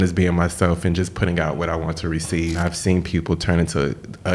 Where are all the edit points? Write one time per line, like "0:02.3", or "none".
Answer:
0:02.6